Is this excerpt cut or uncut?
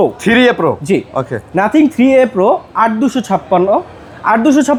uncut